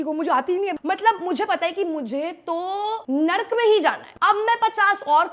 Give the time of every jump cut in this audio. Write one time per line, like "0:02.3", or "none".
0:00.7
0:03.0
0:04.1